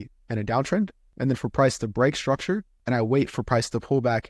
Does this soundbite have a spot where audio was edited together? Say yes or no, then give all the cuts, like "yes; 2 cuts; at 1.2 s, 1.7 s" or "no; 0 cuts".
yes; 2 cuts; at 1.0 s, 2.7 s